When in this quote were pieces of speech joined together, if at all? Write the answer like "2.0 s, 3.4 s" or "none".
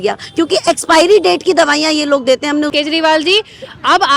2.7 s